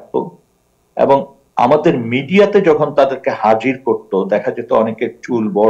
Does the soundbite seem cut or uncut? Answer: uncut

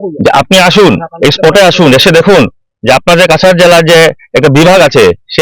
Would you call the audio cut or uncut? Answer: uncut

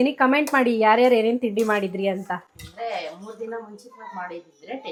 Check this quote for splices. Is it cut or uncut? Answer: uncut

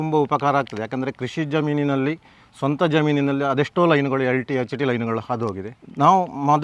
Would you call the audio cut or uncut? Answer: uncut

